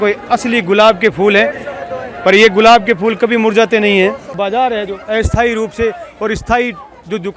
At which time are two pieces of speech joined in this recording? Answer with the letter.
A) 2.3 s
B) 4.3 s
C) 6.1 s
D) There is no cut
B